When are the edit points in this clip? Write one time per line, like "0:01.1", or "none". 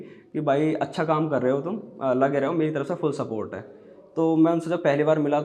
none